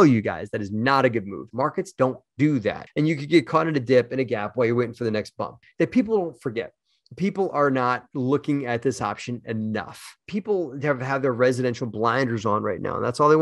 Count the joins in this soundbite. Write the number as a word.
four